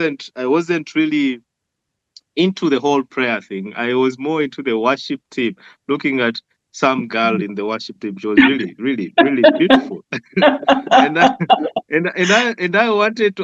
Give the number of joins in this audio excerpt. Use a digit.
0